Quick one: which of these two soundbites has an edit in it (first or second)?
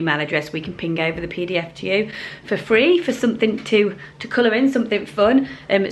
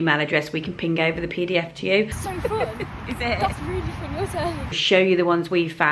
second